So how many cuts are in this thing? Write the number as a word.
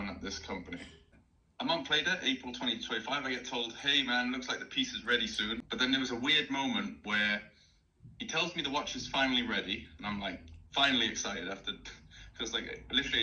two